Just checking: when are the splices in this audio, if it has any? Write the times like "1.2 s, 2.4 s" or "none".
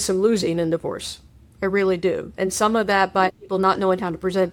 none

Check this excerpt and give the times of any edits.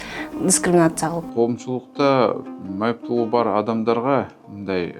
1.3 s

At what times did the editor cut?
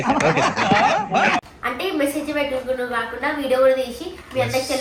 none

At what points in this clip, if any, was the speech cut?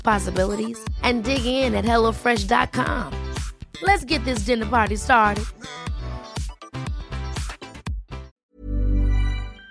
8.4 s

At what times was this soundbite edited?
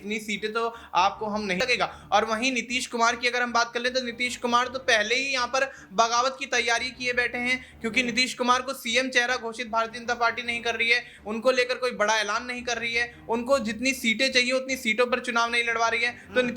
1.6 s

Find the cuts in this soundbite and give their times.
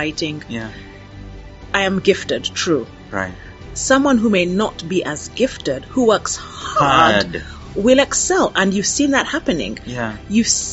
none

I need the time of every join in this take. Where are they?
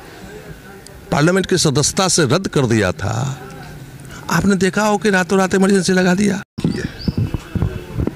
6.5 s

